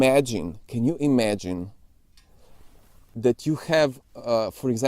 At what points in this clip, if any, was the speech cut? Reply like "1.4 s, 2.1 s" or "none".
3.0 s